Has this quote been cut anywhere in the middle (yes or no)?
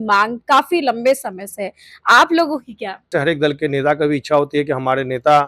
yes